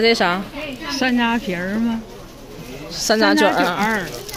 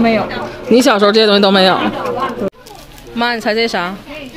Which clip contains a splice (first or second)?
second